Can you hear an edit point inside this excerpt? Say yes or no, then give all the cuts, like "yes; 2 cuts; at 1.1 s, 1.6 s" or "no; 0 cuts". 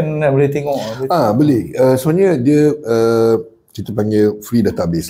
no; 0 cuts